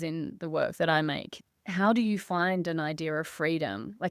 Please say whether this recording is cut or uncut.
cut